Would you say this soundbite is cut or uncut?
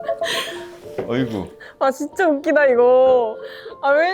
uncut